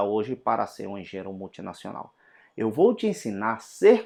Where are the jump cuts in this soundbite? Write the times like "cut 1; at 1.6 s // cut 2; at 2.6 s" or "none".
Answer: none